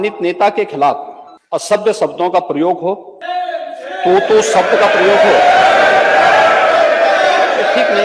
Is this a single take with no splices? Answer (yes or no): no